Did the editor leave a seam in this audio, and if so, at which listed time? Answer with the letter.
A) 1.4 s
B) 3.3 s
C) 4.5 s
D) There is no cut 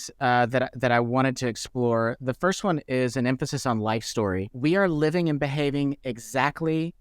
C